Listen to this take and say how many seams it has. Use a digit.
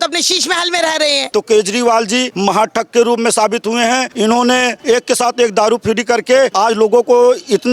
5